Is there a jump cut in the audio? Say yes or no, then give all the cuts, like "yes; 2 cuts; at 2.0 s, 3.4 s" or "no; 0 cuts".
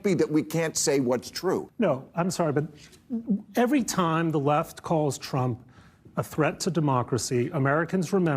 yes; 1 cut; at 1.7 s